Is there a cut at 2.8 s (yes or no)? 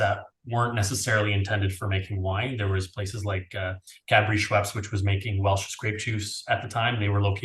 no